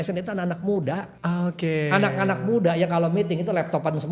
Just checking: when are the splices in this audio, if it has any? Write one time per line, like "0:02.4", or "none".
0:01.1